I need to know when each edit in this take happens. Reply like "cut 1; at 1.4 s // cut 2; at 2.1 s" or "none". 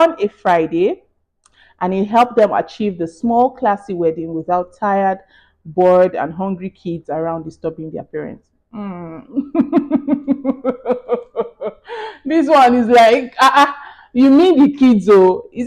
none